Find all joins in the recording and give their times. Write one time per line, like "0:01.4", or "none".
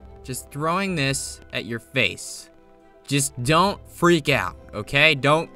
none